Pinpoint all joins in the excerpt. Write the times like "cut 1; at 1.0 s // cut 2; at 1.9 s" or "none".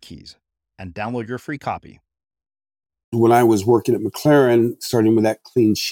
cut 1; at 3.1 s